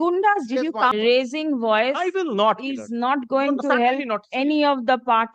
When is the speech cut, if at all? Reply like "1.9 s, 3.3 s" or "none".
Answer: 0.9 s